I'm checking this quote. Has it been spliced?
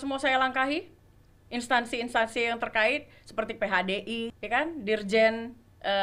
yes; 1 cut; at 4.4 s

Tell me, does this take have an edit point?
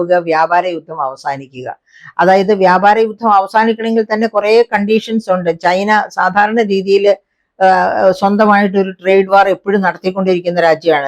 no; 0 cuts

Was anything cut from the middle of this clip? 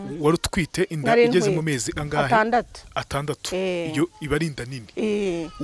no; 0 cuts

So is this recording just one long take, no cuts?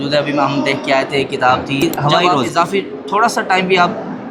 no; 1 cut; at 2.4 s

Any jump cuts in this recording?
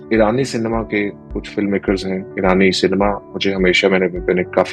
no; 0 cuts

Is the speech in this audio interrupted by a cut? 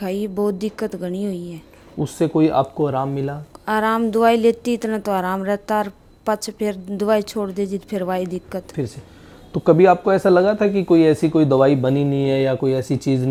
no; 0 cuts

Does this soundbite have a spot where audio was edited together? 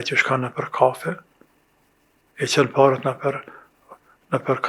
no; 0 cuts

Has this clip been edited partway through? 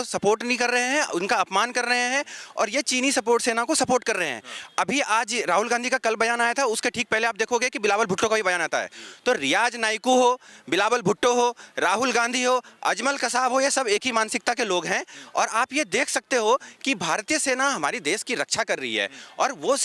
no; 0 cuts

